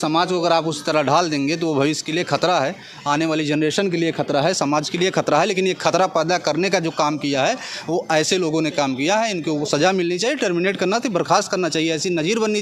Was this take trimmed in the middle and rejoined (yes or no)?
no